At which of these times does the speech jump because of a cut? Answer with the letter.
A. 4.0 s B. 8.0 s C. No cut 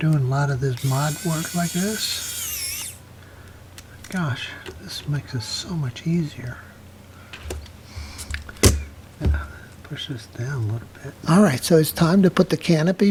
C